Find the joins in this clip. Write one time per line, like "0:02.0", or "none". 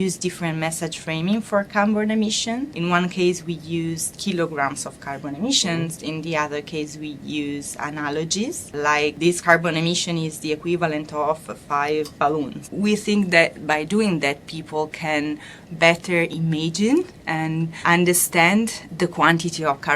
0:02.7
0:04.1
0:08.9
0:12.6
0:17.8